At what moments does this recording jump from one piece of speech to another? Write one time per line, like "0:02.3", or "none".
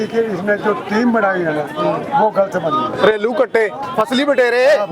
0:03.8